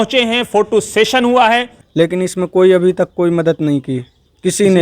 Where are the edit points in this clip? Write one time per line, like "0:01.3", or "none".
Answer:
0:01.8